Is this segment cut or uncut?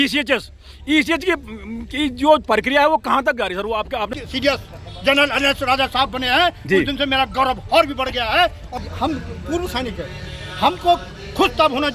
cut